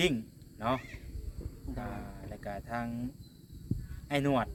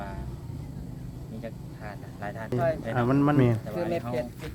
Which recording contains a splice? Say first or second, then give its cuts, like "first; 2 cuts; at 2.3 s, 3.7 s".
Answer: second; 1 cut; at 2.5 s